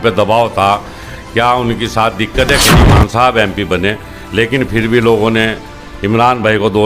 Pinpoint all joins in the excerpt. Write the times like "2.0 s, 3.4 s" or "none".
2.9 s